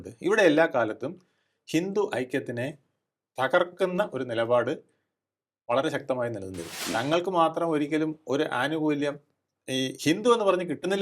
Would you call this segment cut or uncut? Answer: cut